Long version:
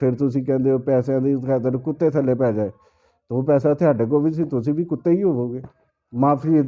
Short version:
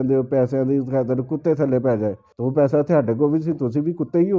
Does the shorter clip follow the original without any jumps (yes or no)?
no